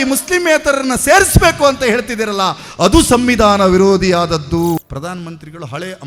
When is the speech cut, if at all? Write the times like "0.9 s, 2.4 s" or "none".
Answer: 4.8 s